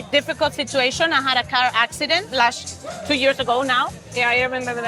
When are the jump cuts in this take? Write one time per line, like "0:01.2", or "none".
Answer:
none